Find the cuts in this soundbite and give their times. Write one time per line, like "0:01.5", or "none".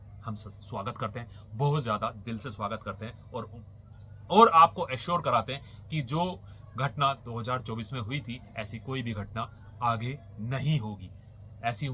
none